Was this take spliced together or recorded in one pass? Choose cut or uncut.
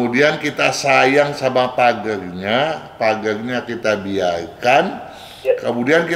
uncut